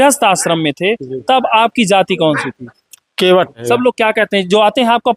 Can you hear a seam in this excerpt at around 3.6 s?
yes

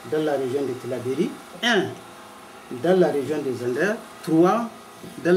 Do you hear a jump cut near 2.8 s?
no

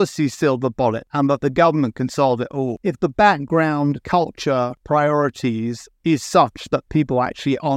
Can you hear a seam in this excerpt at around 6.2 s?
no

